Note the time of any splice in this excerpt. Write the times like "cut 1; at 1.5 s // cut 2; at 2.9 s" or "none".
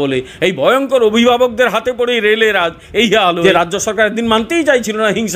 cut 1; at 3.4 s